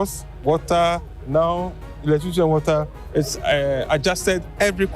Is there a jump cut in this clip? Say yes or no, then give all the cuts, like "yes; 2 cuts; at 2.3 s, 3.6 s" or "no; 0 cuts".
yes; 2 cuts; at 1.1 s, 3.0 s